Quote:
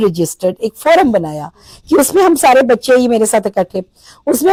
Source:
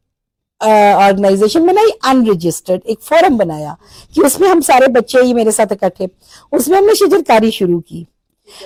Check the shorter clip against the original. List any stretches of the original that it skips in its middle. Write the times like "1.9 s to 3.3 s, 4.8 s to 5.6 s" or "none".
none